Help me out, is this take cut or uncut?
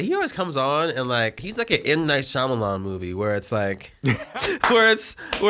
cut